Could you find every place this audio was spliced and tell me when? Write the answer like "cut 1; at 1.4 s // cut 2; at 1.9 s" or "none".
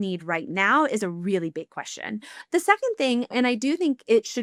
none